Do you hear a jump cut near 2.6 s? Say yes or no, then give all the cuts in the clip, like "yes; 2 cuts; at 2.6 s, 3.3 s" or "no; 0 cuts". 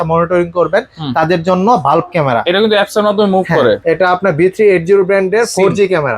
no; 1 cut; at 3.8 s